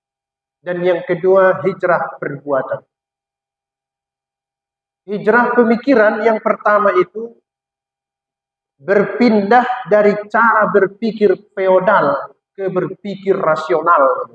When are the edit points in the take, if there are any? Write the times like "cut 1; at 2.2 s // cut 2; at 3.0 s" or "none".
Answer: none